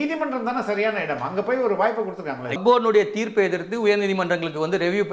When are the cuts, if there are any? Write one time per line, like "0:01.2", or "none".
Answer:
0:02.6